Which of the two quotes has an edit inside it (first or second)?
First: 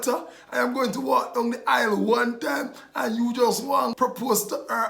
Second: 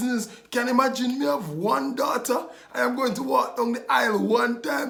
first